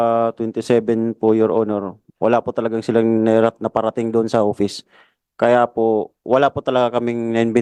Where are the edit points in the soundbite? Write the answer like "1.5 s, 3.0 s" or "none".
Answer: none